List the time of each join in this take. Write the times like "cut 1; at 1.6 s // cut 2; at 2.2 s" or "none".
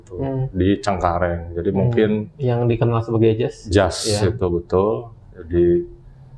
none